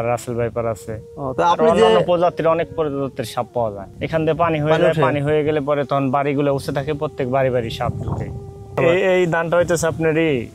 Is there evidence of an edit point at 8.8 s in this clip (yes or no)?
yes